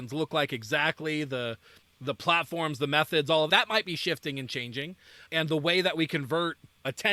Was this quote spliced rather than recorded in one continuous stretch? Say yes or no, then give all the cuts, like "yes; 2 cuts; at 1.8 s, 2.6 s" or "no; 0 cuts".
no; 0 cuts